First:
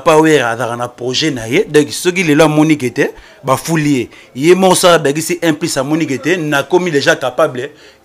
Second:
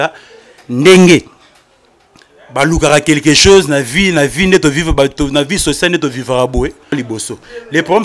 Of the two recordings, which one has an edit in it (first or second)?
second